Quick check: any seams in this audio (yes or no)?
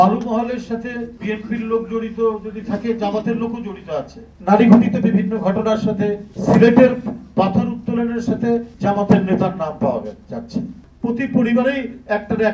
yes